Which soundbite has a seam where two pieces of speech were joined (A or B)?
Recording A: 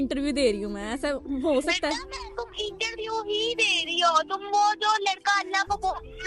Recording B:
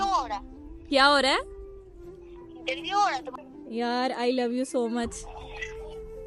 B